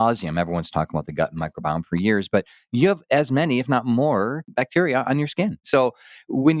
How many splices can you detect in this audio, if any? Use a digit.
2